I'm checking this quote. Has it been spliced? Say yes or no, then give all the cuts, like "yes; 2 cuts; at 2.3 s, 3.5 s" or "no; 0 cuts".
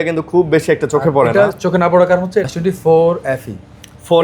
yes; 1 cut; at 2.5 s